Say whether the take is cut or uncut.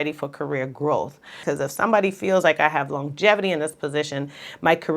cut